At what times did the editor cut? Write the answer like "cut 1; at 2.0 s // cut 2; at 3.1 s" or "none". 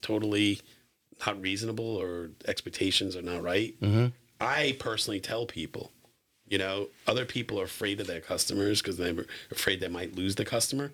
none